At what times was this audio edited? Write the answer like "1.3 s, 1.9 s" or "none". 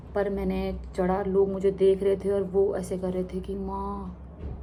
none